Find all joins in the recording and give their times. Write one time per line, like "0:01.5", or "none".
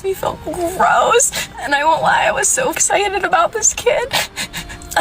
0:03.7